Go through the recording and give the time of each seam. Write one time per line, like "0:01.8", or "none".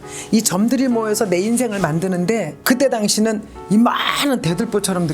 0:02.6